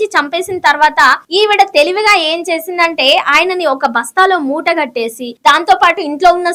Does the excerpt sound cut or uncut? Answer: uncut